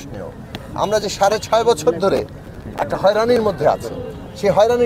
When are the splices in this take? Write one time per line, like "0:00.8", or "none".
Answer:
none